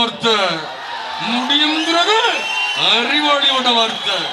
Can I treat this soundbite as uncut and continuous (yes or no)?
yes